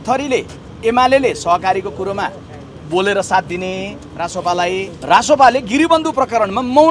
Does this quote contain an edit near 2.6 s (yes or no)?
no